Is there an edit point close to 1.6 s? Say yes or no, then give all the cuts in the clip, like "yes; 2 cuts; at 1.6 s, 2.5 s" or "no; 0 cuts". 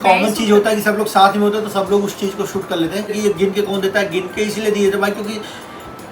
no; 1 cut; at 3.1 s